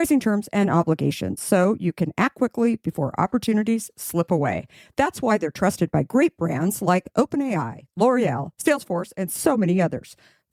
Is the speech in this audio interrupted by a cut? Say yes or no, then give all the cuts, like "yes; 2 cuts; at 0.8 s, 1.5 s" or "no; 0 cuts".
no; 0 cuts